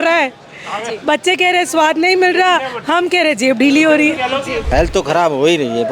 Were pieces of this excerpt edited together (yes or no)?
yes